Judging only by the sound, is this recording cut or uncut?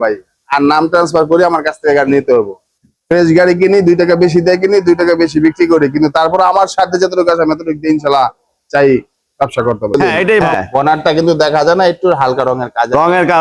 cut